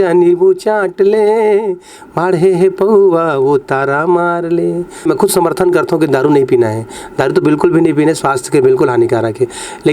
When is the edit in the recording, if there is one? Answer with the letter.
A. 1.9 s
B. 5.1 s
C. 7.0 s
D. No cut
B